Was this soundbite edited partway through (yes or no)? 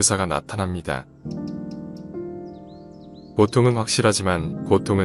no